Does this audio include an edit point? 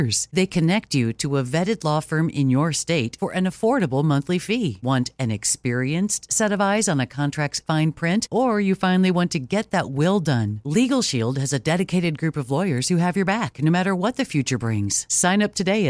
no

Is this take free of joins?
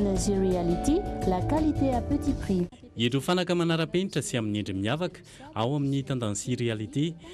yes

